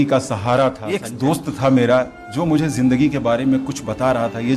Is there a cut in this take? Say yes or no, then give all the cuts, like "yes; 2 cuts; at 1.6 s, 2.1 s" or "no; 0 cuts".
yes; 1 cut; at 1.1 s